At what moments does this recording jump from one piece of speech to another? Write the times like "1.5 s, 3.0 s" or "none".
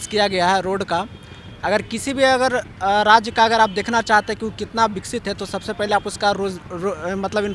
none

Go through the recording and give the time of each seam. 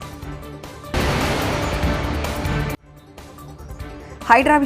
0.9 s, 2.9 s

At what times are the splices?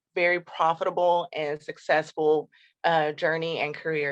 none

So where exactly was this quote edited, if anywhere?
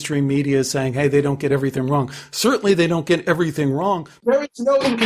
4.1 s

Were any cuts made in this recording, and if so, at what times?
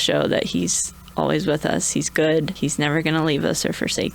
2.5 s

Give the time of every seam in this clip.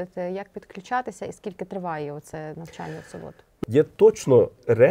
3.5 s

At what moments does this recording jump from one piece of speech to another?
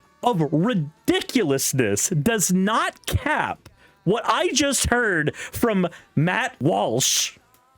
6.6 s

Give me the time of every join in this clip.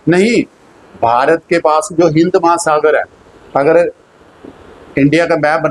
none

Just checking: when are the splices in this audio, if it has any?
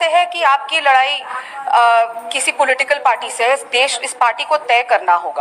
none

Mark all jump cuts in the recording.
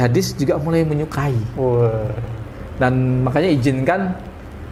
none

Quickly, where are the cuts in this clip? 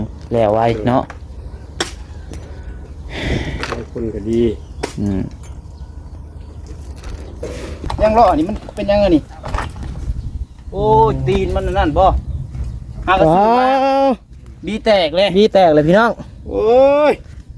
7.7 s

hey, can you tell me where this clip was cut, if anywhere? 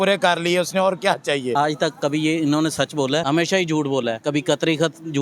1.5 s, 3.2 s, 4.2 s

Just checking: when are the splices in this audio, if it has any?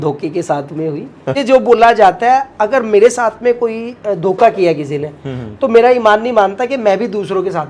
1.4 s

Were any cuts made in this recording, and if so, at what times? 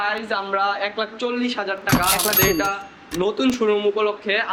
none

